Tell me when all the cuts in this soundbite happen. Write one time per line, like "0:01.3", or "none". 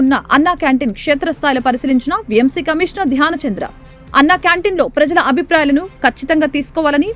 none